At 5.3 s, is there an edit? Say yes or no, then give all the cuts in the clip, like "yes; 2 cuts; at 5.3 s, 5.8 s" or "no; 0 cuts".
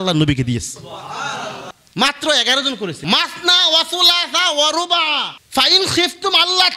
no; 2 cuts; at 1.7 s, 3.0 s